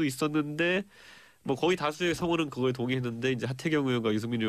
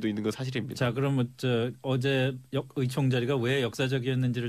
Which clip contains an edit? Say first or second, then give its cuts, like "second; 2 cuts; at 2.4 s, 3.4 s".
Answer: first; 1 cut; at 2.4 s